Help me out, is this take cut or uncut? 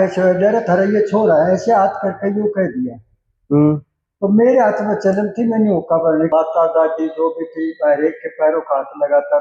cut